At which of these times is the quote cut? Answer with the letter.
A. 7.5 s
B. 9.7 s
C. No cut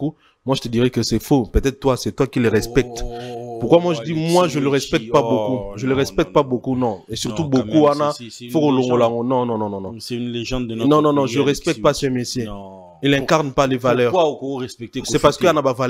C